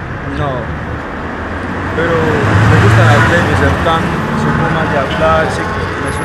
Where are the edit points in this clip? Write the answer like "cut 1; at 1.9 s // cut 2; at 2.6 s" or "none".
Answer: none